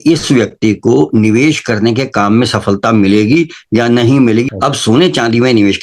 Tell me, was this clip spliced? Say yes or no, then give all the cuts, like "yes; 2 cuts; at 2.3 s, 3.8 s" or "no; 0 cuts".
yes; 1 cut; at 4.5 s